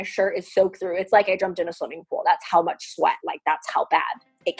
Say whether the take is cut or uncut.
uncut